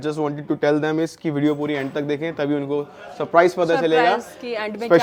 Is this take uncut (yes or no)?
yes